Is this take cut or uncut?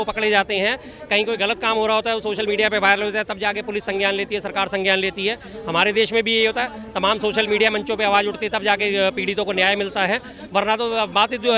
uncut